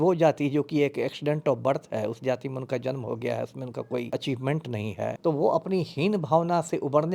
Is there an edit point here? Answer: yes; 2 cuts; at 4.1 s, 5.2 s

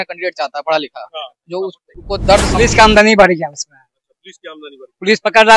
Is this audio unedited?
no; 1 cut; at 2.5 s

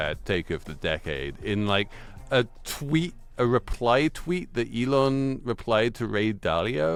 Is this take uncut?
yes; 0 cuts

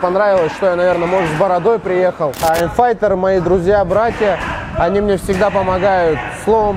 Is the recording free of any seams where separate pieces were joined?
no; 1 cut; at 2.4 s

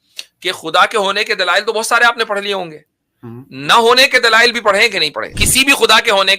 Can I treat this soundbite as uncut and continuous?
no; 1 cut; at 5.4 s

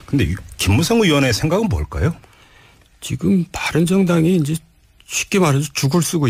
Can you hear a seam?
yes; 1 cut; at 3.8 s

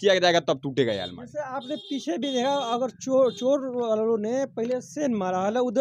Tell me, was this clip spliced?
no; 0 cuts

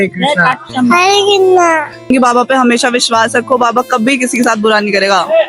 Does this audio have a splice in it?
yes; 1 cut; at 2.1 s

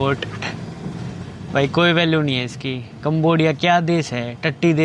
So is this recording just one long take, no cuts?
yes; 0 cuts

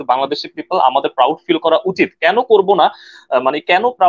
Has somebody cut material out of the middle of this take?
no; 0 cuts

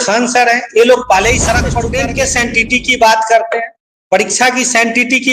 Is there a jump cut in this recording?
yes; 1 cut; at 1.9 s

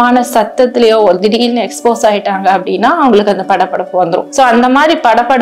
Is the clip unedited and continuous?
yes; 0 cuts

